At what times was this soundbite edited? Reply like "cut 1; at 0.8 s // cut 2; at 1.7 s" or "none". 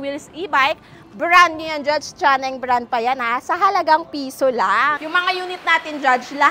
cut 1; at 5.0 s

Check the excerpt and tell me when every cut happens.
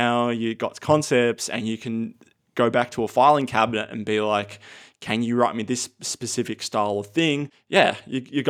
cut 1; at 7.6 s

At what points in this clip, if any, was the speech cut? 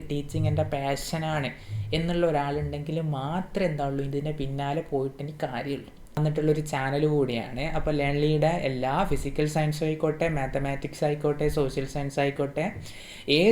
cut 1; at 6.2 s

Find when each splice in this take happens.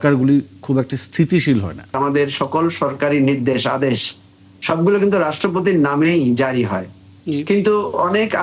cut 1; at 2.0 s

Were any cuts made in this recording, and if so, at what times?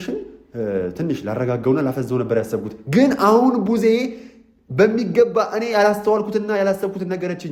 none

